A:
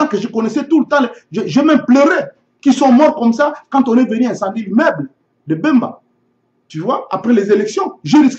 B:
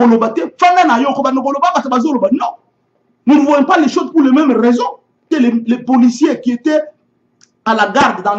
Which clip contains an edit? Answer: B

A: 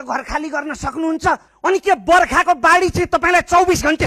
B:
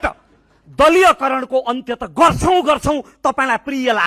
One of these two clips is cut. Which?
A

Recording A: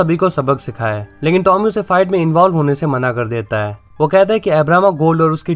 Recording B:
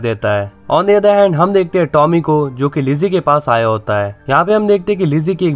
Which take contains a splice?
B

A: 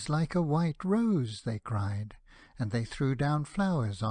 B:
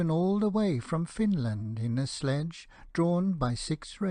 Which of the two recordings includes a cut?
A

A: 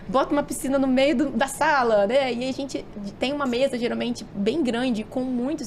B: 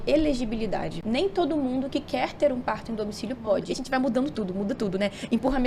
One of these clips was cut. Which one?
B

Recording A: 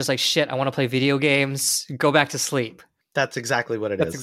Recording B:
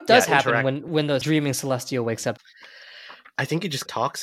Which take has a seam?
B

